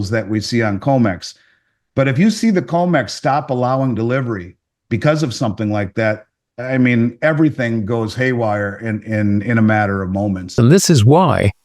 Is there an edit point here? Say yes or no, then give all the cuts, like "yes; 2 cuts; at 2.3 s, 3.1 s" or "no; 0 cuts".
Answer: yes; 1 cut; at 10.5 s